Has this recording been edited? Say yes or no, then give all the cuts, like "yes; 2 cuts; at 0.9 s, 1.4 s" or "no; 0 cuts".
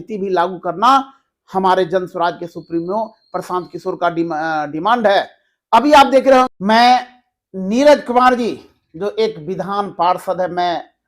yes; 1 cut; at 6.5 s